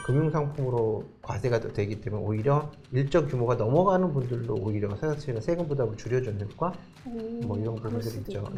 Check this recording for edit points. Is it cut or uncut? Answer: uncut